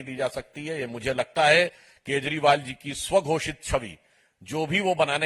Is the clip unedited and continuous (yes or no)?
yes